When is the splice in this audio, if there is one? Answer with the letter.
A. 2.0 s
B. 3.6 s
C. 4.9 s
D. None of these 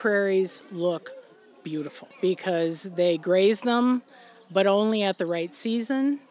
A